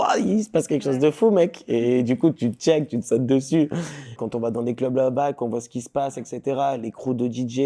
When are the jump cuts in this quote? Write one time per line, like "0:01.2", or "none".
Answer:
0:04.2